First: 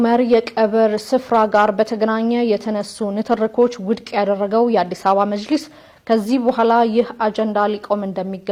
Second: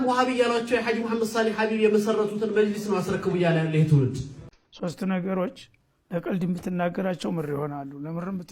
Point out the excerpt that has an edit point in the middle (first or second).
second